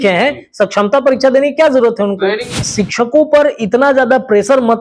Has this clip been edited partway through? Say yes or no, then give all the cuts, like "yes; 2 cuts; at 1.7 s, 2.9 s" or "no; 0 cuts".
yes; 1 cut; at 2.6 s